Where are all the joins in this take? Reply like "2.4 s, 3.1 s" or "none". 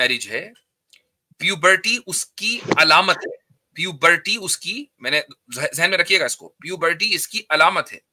none

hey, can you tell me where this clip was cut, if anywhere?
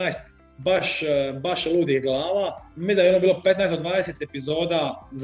2.7 s

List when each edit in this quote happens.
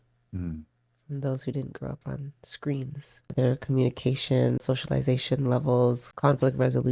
3.3 s, 4.6 s, 6.1 s

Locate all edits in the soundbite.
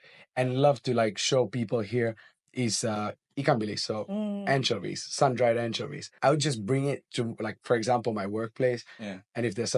6.1 s

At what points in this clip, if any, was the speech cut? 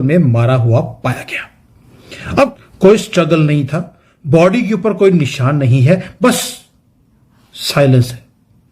2.6 s

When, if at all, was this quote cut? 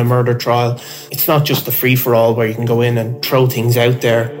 1.0 s, 3.2 s

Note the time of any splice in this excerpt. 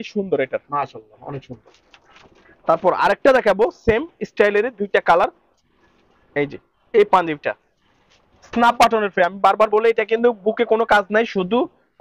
none

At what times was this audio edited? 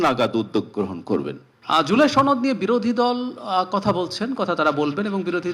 1.5 s

